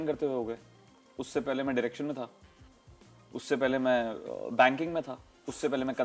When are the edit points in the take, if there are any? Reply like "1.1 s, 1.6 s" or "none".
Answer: none